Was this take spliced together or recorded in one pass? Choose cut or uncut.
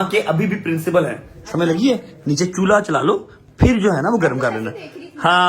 uncut